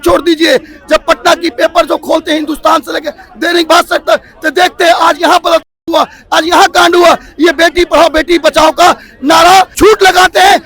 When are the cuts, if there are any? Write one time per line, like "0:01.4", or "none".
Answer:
0:09.7